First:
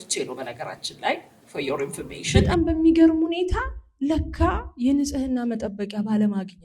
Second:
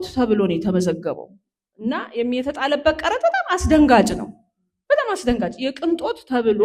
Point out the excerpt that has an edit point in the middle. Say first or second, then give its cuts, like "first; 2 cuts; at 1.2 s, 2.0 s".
first; 1 cut; at 2.2 s